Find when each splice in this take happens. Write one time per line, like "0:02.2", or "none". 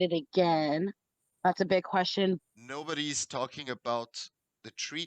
0:02.4